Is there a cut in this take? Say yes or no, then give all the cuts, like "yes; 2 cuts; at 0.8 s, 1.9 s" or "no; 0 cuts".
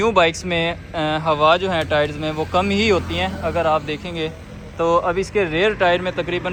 no; 0 cuts